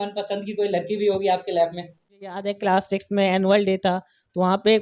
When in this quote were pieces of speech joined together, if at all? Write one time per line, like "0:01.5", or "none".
0:02.4